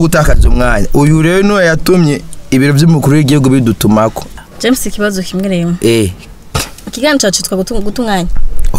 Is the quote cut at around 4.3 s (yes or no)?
yes